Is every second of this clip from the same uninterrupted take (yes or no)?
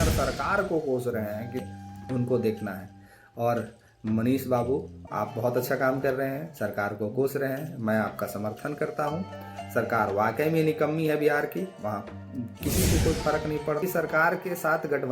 no